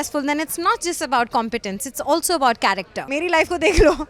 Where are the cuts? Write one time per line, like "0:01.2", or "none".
0:03.0